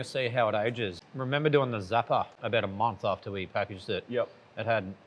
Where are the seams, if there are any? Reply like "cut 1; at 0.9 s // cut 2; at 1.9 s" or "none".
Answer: cut 1; at 0.9 s // cut 2; at 2.4 s